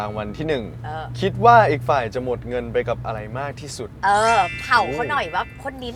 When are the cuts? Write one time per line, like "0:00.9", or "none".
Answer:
none